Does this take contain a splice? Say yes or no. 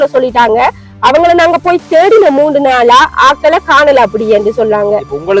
no